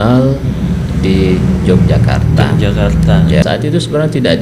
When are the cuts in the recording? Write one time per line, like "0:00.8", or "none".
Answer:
0:03.4